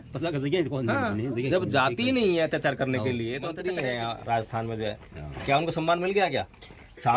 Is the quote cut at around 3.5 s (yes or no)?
yes